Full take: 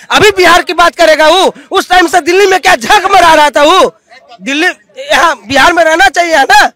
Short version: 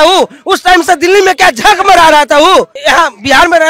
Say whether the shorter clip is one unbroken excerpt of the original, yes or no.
no